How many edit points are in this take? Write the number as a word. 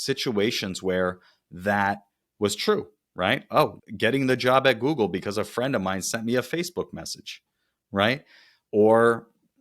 one